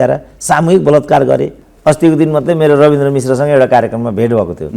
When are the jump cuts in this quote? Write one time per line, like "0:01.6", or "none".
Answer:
0:01.6